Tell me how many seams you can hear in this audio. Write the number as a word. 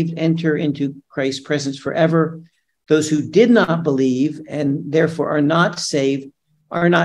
zero